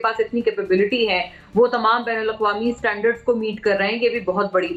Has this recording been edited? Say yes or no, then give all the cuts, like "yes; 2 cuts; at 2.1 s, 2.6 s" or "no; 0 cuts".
no; 0 cuts